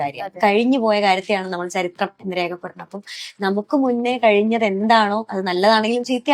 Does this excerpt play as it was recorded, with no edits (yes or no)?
yes